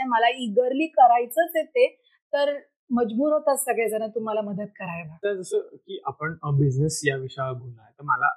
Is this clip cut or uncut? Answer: uncut